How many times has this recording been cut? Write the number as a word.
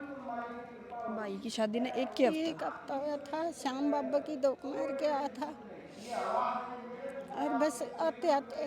zero